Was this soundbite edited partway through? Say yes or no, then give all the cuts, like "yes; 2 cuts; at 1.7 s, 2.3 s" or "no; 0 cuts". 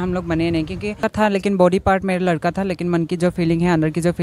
yes; 1 cut; at 1.0 s